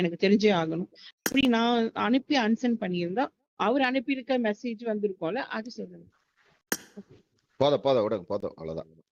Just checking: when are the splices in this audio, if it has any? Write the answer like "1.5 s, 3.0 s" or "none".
none